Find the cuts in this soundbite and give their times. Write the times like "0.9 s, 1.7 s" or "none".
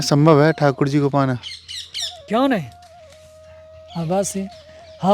none

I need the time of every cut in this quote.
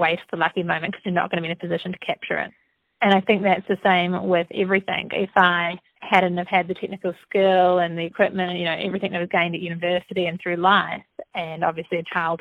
5.0 s

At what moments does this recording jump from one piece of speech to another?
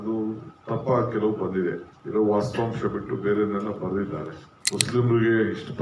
1.9 s

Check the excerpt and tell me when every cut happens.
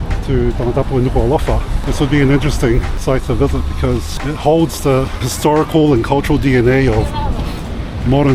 1.7 s, 2.9 s, 4.1 s, 5.3 s

